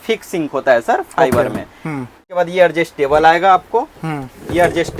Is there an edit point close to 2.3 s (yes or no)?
yes